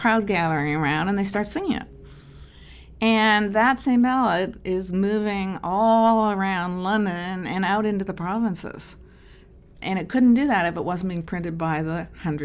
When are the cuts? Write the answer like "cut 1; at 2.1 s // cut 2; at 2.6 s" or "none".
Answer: cut 1; at 9.8 s